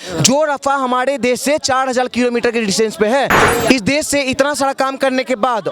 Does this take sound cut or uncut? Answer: cut